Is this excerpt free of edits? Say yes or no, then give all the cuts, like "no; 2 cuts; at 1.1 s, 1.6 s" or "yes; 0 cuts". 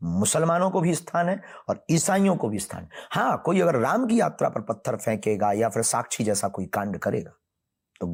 yes; 0 cuts